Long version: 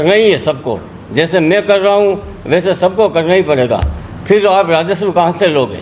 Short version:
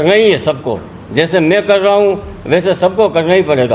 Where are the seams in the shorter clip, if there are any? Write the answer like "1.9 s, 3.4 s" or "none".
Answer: none